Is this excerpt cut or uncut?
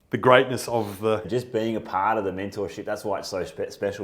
cut